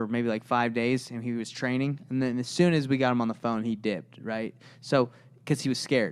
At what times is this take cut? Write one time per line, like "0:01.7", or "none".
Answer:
none